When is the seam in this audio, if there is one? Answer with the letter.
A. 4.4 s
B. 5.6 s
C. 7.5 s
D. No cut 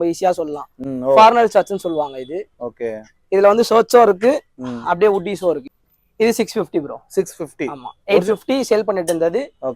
B